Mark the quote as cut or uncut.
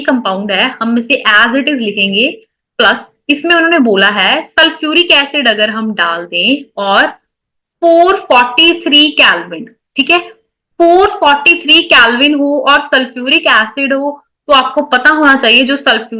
uncut